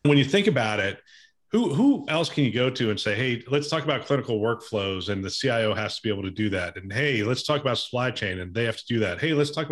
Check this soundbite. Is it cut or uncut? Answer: uncut